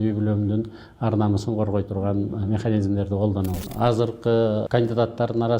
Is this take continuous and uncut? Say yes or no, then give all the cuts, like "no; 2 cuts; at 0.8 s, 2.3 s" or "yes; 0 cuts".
no; 2 cuts; at 3.5 s, 4.7 s